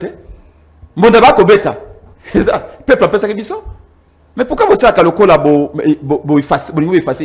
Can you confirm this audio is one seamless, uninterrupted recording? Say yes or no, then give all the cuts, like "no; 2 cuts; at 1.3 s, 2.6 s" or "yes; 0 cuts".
yes; 0 cuts